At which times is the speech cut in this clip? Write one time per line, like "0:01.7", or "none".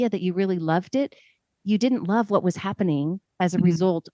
none